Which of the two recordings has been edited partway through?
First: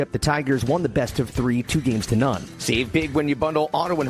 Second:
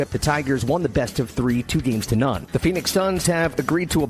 first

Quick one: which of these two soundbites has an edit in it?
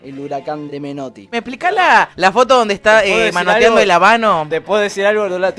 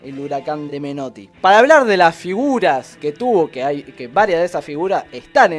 first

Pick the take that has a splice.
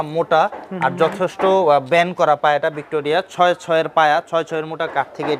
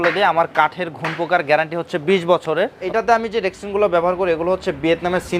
second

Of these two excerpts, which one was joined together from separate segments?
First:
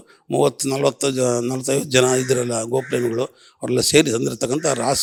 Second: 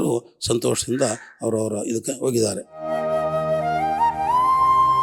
second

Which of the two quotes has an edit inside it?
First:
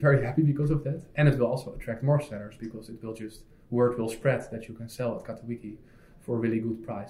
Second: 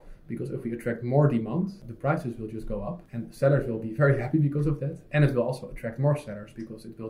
second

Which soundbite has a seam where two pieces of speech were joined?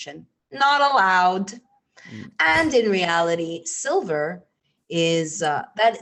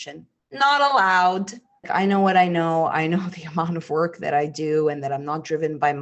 second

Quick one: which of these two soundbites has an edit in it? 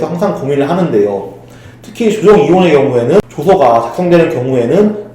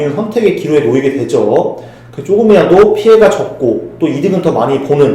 first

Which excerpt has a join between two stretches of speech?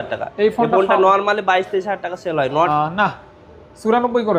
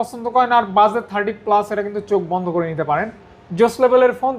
first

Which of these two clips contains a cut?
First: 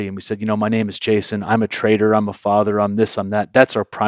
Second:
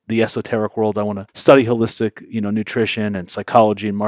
second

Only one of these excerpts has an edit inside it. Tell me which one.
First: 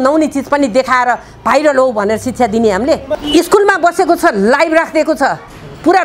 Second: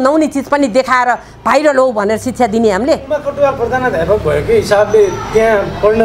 first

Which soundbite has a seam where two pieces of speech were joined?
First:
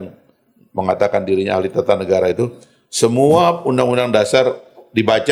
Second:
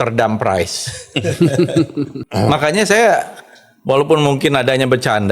second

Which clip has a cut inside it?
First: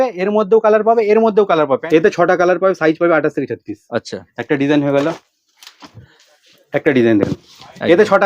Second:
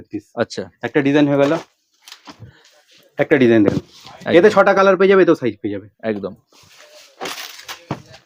first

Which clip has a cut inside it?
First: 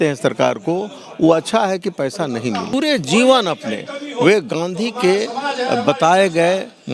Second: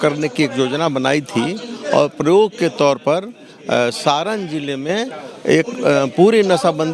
first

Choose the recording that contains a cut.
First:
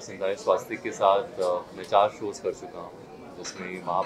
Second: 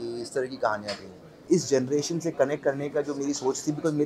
second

